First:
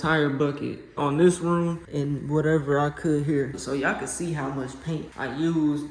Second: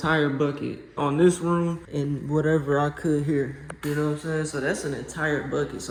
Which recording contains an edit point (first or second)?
first